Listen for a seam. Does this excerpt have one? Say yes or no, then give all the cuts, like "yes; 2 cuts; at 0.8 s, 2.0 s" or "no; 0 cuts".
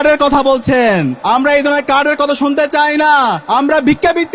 yes; 2 cuts; at 1.1 s, 3.4 s